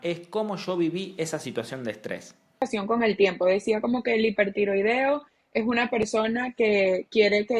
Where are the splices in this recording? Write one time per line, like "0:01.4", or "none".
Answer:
0:02.6